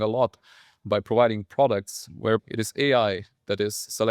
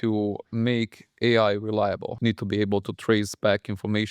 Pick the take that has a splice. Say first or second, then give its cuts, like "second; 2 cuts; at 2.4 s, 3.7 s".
first; 1 cut; at 2.4 s